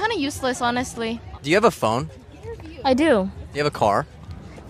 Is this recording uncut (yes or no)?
no